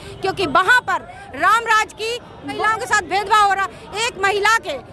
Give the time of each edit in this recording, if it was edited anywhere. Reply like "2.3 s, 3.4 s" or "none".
2.6 s

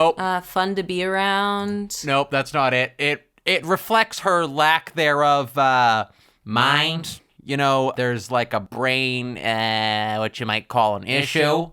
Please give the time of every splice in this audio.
none

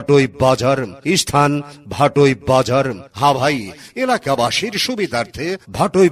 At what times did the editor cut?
1.0 s, 3.0 s

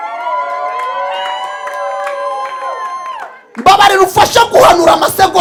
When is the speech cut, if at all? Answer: none

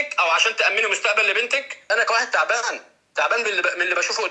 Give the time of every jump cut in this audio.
1.8 s

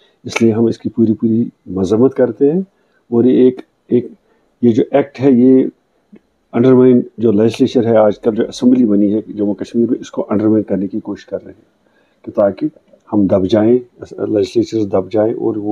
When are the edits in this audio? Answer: none

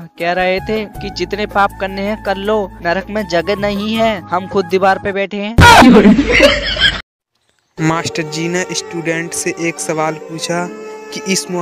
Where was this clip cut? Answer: 7.1 s

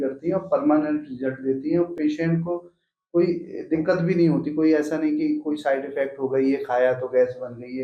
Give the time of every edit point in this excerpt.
none

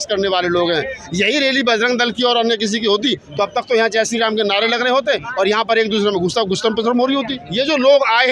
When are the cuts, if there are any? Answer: 7.4 s

